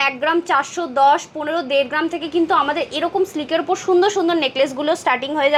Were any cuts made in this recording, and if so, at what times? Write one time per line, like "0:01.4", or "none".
none